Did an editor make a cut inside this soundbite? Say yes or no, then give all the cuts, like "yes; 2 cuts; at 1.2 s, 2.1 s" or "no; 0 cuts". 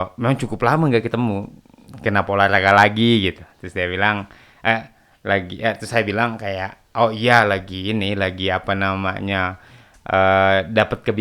no; 0 cuts